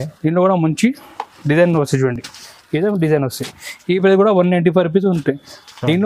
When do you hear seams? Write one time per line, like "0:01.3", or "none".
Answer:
none